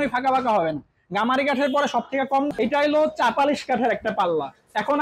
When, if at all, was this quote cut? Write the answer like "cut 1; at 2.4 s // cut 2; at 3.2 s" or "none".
cut 1; at 2.5 s